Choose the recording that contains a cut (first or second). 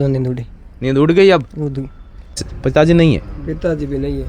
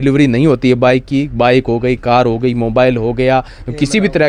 first